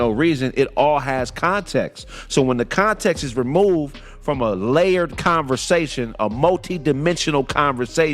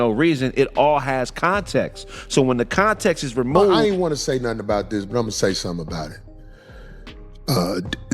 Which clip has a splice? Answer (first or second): second